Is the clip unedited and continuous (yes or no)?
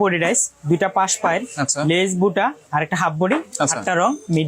yes